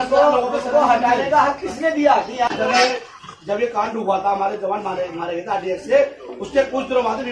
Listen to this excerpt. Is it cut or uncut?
cut